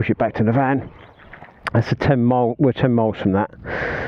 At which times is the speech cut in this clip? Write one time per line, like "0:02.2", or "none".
none